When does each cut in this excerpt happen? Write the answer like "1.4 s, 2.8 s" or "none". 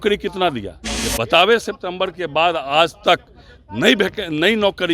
0.9 s